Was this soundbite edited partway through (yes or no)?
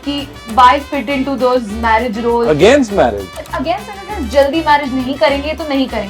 no